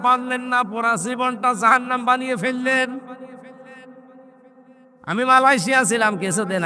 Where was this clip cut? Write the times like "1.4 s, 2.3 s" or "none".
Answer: none